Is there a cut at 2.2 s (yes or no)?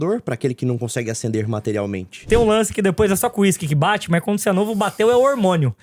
yes